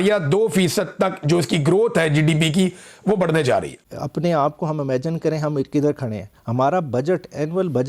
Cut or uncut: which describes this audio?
cut